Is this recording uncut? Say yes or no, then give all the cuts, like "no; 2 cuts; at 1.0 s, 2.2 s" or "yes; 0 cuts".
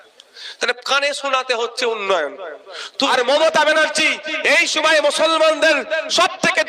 no; 1 cut; at 3.1 s